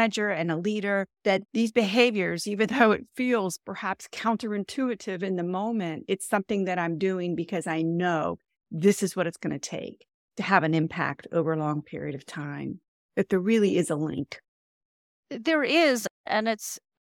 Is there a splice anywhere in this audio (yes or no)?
yes